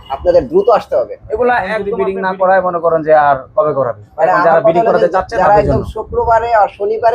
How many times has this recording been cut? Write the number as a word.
one